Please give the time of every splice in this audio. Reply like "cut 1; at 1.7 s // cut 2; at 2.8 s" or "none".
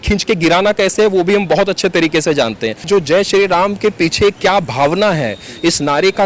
cut 1; at 2.8 s